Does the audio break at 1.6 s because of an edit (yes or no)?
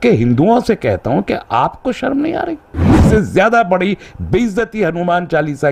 no